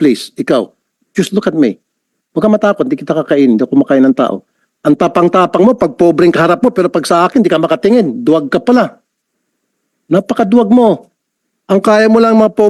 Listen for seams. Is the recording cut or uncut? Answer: uncut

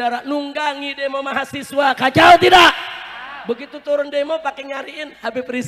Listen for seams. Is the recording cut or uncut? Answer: uncut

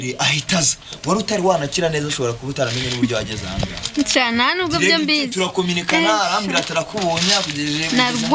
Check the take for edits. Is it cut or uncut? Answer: uncut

